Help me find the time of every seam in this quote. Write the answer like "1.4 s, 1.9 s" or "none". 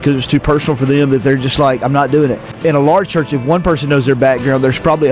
2.5 s